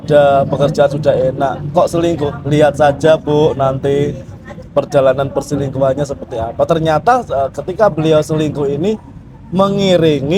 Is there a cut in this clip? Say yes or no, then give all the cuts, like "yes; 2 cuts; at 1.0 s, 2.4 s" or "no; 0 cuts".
no; 0 cuts